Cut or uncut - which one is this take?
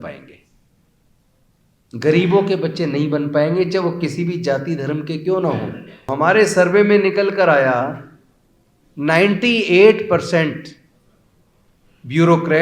cut